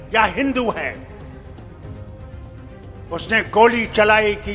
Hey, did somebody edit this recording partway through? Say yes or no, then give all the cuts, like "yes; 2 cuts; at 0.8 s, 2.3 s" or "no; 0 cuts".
no; 0 cuts